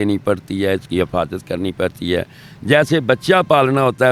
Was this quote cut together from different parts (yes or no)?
no